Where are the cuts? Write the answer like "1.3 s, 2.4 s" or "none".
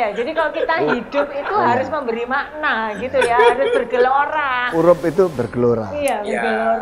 4.6 s